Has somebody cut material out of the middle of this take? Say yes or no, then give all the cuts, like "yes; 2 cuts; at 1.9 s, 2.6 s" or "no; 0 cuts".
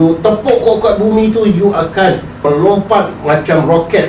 yes; 1 cut; at 2.4 s